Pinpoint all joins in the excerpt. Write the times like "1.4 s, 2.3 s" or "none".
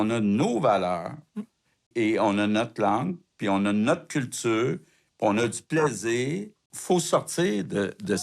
1.9 s, 6.6 s